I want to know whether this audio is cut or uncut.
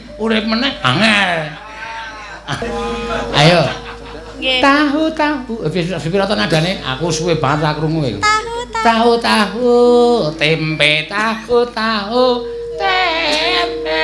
cut